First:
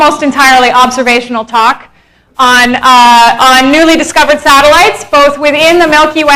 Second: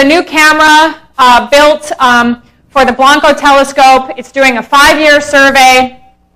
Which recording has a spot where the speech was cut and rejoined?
second; 1 cut; at 1.6 s

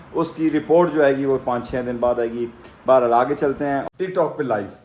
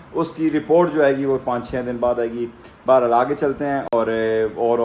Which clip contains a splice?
first; 1 cut; at 3.8 s

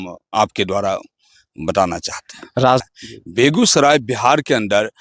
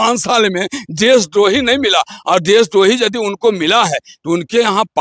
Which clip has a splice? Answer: first; 1 cut; at 2.8 s

